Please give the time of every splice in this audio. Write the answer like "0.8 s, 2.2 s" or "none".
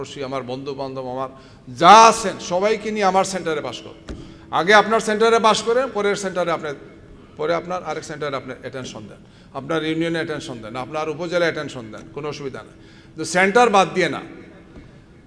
none